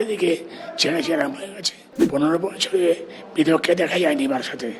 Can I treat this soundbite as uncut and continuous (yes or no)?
no